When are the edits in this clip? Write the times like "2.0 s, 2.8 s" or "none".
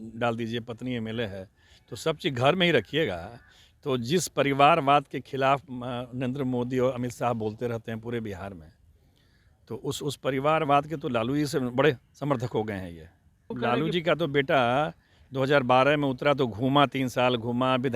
13.6 s